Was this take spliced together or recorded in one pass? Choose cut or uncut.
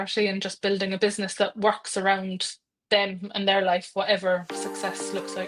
uncut